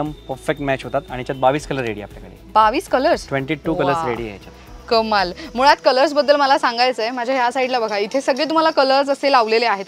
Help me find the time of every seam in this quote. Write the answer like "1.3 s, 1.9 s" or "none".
none